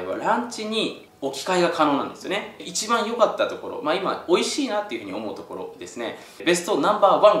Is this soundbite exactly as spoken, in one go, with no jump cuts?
no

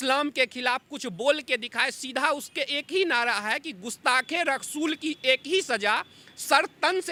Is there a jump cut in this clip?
no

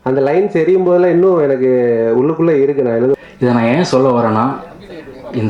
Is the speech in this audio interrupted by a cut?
yes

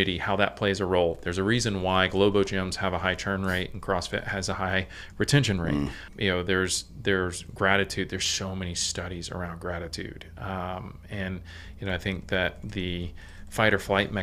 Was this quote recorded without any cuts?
no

